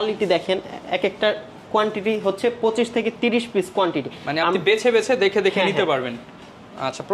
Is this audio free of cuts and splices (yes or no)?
yes